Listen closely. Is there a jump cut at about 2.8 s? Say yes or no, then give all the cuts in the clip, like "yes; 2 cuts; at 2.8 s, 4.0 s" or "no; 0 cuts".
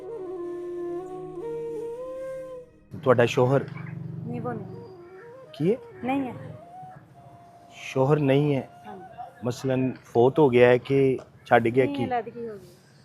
yes; 1 cut; at 2.8 s